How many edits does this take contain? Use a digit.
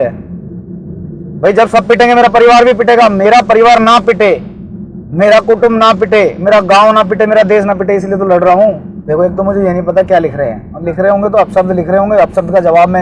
1